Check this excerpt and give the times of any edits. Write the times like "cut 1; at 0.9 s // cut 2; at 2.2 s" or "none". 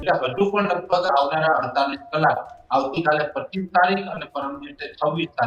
none